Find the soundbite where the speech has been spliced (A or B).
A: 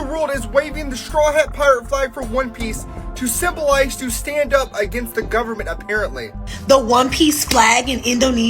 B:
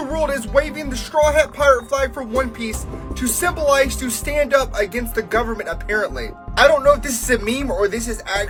A